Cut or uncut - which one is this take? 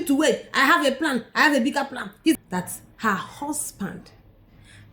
cut